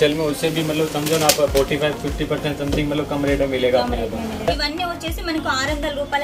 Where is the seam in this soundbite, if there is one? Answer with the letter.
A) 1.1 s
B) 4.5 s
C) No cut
B